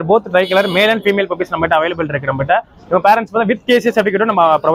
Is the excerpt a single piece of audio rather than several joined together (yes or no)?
yes